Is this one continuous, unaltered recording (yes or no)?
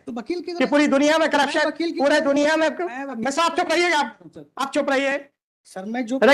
yes